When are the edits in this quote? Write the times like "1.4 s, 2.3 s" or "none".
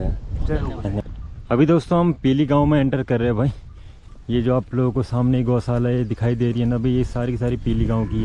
1.0 s